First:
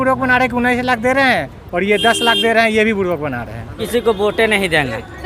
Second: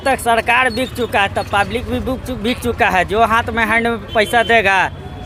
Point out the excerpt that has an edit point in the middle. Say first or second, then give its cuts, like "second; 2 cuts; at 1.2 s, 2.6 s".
first; 1 cut; at 3.8 s